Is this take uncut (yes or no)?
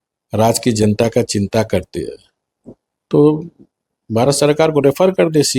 yes